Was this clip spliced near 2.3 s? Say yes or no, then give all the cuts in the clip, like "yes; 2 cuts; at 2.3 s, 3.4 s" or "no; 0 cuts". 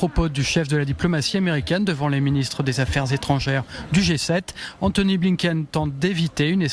no; 1 cut; at 4.1 s